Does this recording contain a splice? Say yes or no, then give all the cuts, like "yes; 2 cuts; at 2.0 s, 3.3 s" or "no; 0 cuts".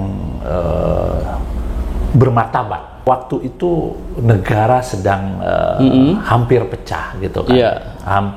yes; 1 cut; at 2.9 s